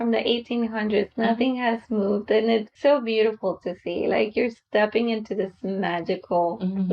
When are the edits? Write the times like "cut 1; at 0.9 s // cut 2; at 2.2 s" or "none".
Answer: cut 1; at 2.7 s